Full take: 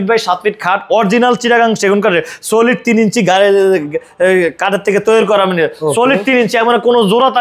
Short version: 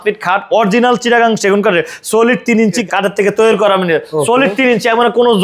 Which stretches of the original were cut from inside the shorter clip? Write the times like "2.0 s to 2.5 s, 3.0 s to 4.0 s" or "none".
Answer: 3.2 s to 4.5 s